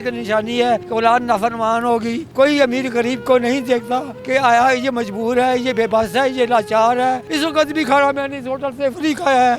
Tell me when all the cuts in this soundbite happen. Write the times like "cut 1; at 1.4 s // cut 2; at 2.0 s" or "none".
cut 1; at 2.3 s // cut 2; at 7.3 s